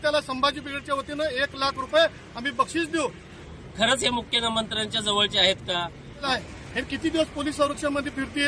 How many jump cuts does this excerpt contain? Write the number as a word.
two